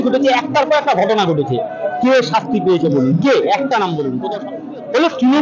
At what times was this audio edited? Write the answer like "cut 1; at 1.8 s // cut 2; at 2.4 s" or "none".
cut 1; at 4.5 s